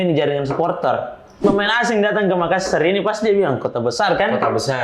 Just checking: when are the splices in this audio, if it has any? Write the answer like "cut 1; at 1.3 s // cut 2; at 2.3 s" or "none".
cut 1; at 1.3 s